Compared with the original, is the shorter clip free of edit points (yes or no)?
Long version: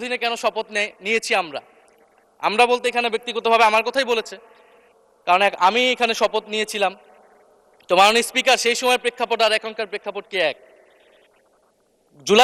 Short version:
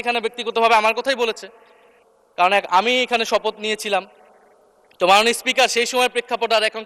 yes